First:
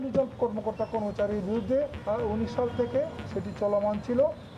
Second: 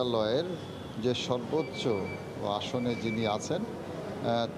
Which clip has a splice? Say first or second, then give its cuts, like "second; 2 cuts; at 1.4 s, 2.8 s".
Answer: first; 2 cuts; at 2.0 s, 3.3 s